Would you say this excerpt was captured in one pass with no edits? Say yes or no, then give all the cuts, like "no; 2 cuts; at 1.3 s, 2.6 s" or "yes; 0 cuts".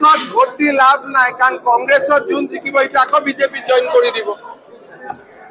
yes; 0 cuts